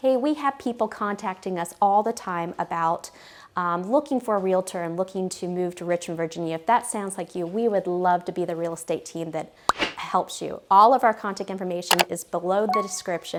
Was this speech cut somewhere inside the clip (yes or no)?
no